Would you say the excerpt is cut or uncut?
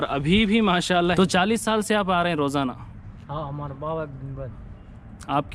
cut